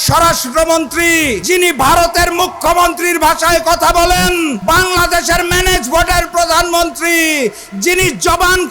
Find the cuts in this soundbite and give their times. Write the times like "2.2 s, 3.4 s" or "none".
1.4 s, 4.6 s